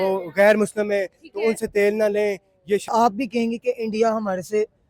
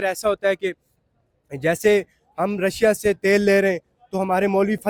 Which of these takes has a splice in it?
first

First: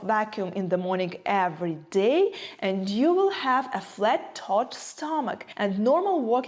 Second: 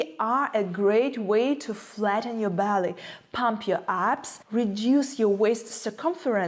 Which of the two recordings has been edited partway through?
first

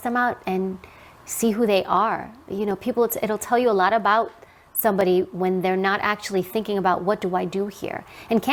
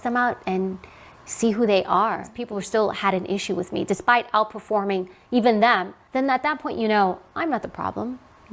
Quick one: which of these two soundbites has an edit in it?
second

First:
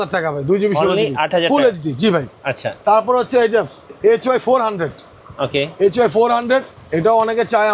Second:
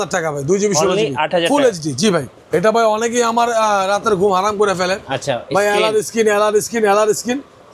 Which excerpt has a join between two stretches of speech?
second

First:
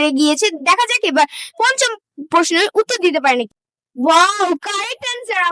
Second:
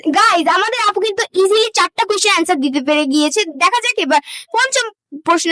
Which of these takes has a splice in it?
first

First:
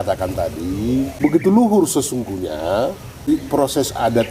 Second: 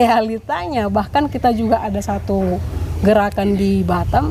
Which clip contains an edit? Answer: first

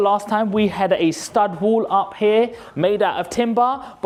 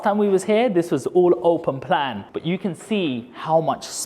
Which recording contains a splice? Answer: second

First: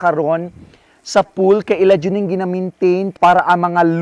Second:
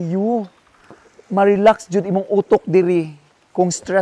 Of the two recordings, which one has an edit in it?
first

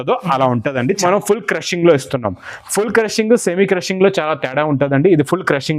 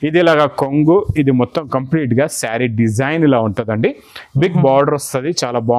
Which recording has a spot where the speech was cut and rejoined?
first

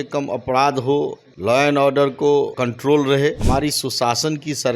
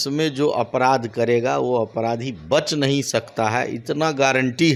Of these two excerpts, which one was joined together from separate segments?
first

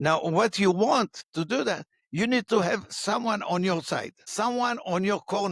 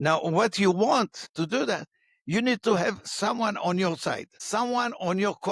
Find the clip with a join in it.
first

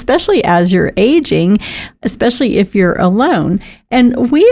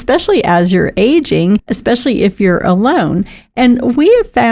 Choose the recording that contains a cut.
second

